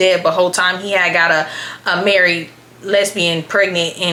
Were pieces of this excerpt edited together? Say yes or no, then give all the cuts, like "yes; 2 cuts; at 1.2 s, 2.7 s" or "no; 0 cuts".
no; 0 cuts